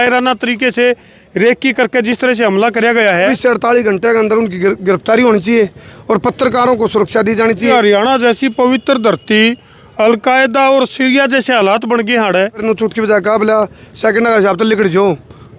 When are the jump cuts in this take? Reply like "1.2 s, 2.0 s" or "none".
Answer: 3.3 s, 7.7 s, 12.6 s